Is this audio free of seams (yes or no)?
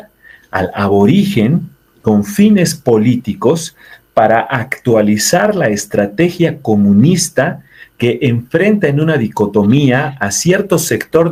yes